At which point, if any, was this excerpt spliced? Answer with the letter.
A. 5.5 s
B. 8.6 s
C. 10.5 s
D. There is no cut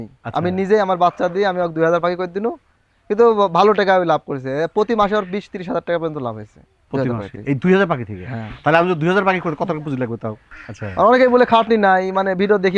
C